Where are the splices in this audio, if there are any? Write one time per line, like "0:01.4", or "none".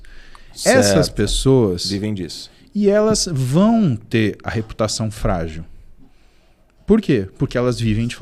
none